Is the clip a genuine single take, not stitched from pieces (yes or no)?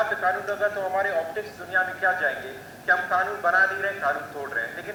yes